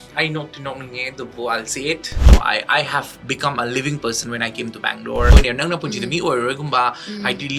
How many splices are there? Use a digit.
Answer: 2